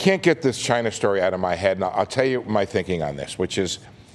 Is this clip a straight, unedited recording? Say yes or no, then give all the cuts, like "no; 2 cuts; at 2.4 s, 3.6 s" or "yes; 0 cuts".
yes; 0 cuts